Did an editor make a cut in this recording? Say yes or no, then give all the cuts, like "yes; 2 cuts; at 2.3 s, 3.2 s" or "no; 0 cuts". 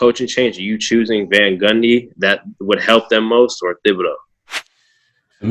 no; 0 cuts